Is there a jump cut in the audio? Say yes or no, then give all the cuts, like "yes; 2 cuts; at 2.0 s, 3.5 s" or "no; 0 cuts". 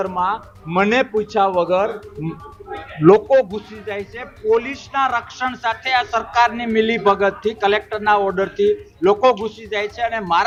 no; 0 cuts